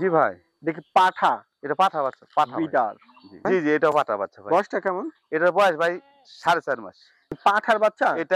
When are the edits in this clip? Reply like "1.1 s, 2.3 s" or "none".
3.4 s, 7.3 s